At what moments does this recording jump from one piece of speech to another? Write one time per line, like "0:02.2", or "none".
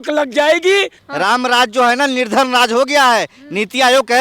0:01.0